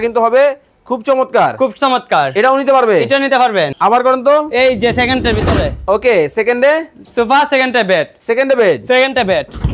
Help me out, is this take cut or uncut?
cut